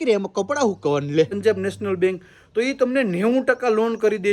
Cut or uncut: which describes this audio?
cut